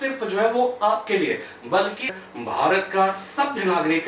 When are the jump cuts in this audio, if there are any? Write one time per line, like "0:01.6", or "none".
0:02.1